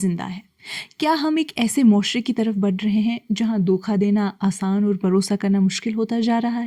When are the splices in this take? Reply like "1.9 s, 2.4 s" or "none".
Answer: none